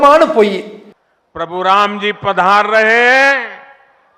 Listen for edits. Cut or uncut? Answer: uncut